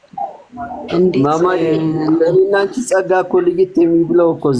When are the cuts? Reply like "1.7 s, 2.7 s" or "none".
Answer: none